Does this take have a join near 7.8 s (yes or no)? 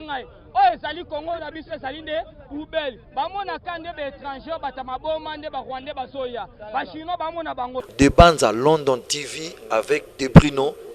yes